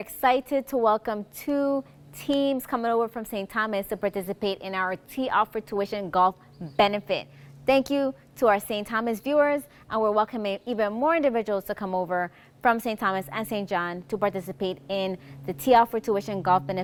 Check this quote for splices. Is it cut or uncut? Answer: uncut